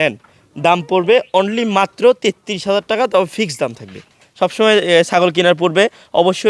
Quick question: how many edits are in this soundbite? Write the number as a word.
one